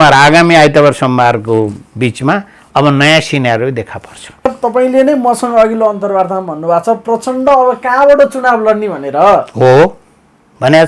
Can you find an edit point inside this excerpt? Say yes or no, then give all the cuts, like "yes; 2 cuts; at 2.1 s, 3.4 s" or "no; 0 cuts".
yes; 1 cut; at 4.5 s